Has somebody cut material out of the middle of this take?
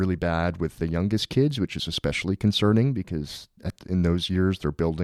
no; 0 cuts

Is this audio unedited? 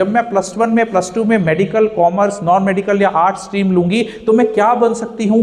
yes; 0 cuts

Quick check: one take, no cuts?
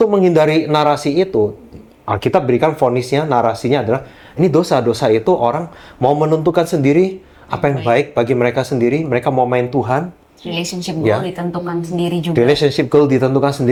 yes; 0 cuts

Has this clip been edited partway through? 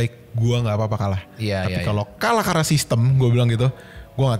no; 0 cuts

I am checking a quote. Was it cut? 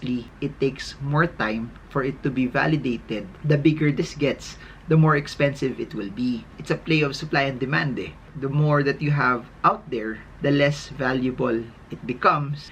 yes; 1 cut; at 6.5 s

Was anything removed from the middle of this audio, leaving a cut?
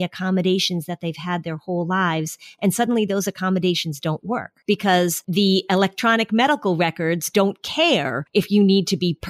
yes; 3 cuts; at 4.5 s, 5.2 s, 8.2 s

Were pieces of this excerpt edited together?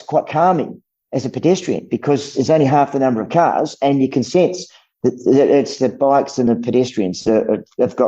no; 0 cuts

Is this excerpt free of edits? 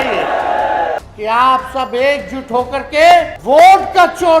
no; 2 cuts; at 1.0 s, 3.3 s

